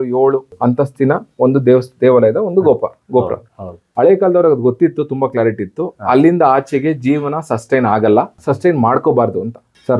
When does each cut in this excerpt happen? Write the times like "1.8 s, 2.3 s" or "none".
none